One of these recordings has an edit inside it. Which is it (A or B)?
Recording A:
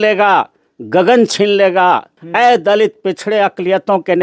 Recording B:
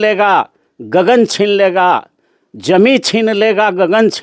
A